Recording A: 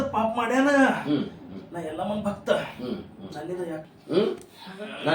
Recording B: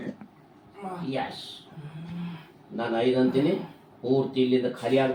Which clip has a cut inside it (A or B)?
A